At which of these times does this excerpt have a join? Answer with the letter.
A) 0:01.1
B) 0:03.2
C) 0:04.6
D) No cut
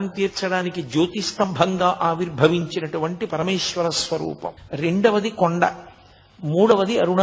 C